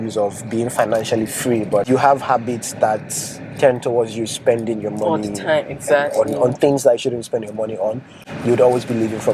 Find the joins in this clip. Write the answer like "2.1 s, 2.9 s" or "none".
none